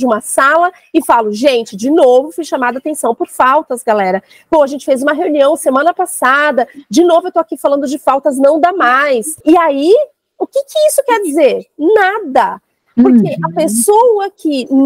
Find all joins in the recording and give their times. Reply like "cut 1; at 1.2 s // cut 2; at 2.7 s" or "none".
cut 1; at 9.3 s